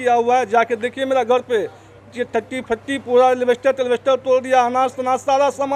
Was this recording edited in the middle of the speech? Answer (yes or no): no